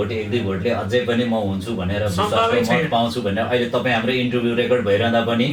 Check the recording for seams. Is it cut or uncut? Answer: uncut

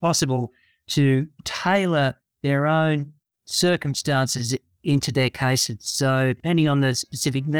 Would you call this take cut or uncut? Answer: cut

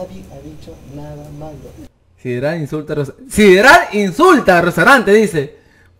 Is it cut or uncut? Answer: cut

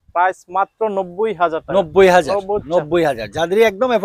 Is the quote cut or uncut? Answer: uncut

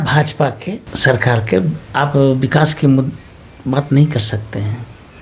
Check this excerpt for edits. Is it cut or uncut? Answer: uncut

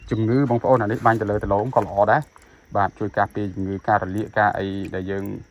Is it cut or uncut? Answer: uncut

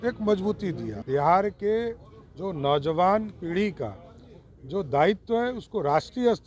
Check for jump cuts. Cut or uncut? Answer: cut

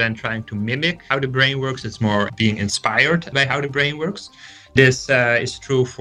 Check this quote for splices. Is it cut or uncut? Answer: cut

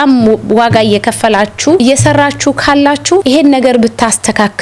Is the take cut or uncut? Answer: cut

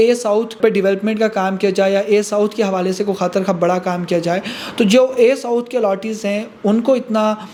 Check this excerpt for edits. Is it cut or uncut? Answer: uncut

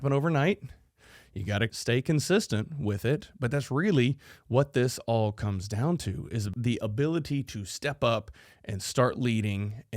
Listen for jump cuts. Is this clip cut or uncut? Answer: cut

